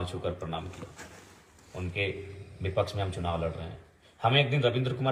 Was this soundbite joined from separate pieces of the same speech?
no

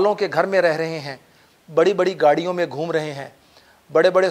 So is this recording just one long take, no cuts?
yes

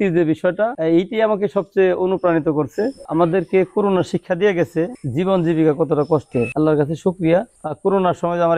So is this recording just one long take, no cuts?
no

